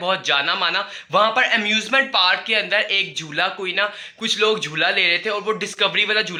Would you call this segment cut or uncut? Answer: uncut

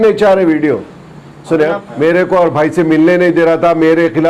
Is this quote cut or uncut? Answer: cut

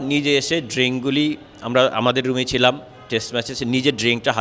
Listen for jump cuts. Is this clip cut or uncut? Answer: uncut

